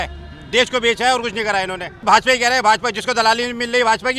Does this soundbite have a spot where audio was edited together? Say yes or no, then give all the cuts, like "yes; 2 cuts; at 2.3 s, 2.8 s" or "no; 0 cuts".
yes; 1 cut; at 1.9 s